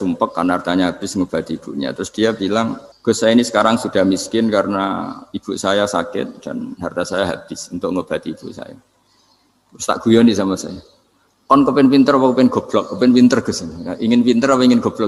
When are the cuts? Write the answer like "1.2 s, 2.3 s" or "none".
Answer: 2.9 s